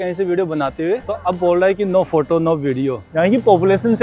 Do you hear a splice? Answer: yes; 2 cuts; at 1.1 s, 3.1 s

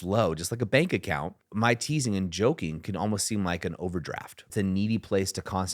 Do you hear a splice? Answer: yes; 2 cuts; at 1.4 s, 4.5 s

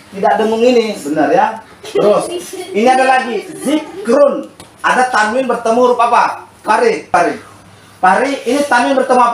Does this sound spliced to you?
yes; 1 cut; at 7.1 s

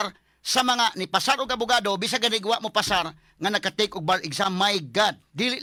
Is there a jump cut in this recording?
no; 0 cuts

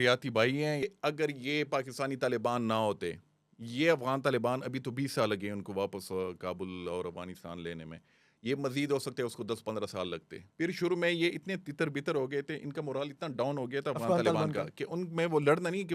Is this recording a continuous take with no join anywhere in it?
no; 2 cuts; at 0.8 s, 10.4 s

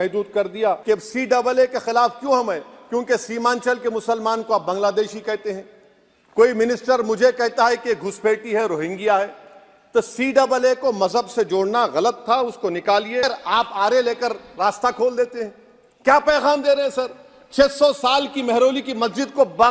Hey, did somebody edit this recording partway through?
yes; 2 cuts; at 0.8 s, 13.3 s

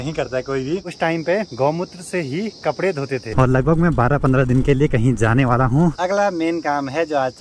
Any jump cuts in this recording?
yes; 3 cuts; at 1.1 s, 3.3 s, 6.0 s

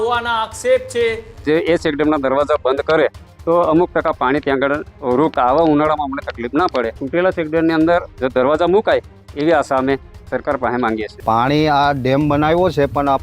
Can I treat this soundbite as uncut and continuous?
no; 4 cuts; at 1.4 s, 5.3 s, 7.0 s, 11.1 s

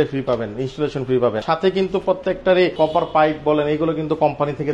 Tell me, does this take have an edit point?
yes; 2 cuts; at 1.4 s, 2.7 s

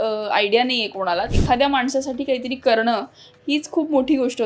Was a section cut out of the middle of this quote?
yes; 1 cut; at 1.3 s

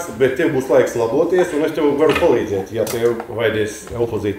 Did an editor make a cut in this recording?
no; 0 cuts

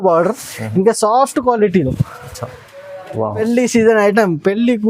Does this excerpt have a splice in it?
yes; 1 cut; at 3.4 s

